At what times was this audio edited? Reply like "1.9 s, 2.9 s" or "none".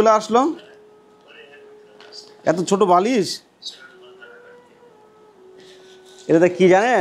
none